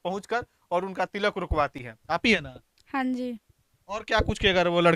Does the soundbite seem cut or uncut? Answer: uncut